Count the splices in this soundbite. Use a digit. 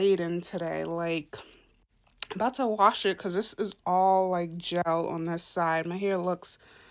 0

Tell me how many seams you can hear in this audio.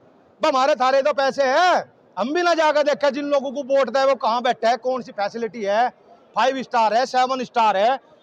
0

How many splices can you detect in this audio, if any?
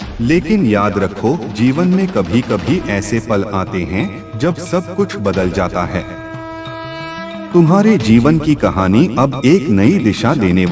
2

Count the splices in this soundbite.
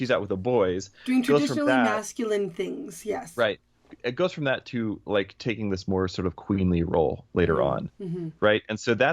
0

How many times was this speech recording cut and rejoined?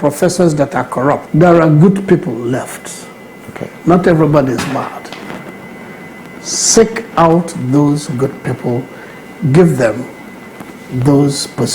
1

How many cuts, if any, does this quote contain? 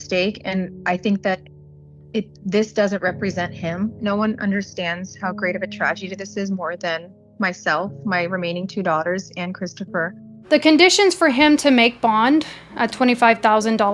0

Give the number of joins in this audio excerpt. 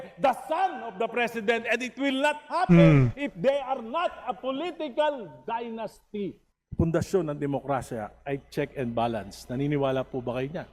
1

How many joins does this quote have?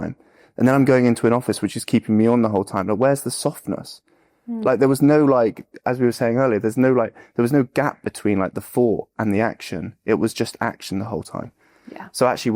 0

